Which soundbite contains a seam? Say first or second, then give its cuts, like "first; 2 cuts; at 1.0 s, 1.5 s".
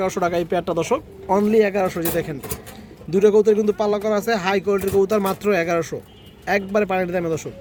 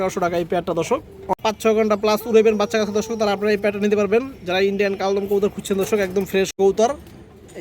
second; 2 cuts; at 1.3 s, 6.6 s